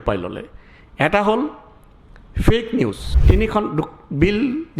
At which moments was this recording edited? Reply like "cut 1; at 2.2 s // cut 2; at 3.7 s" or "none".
cut 1; at 3.1 s